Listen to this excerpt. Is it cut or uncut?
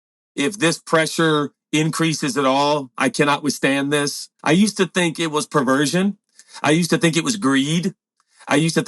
cut